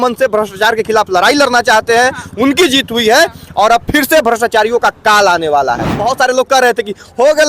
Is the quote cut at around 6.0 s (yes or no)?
yes